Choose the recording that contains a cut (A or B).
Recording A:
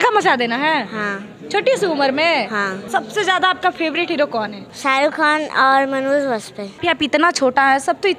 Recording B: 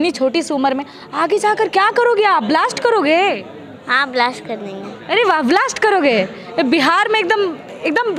A